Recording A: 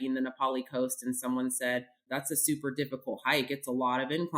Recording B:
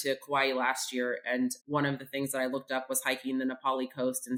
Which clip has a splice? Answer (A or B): A